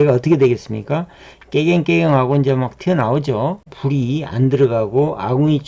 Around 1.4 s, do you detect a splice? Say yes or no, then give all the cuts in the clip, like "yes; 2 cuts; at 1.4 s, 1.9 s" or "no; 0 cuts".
no; 1 cut; at 3.7 s